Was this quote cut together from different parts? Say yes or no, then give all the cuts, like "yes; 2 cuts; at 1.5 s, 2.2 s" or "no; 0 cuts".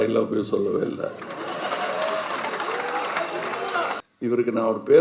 yes; 1 cut; at 4.1 s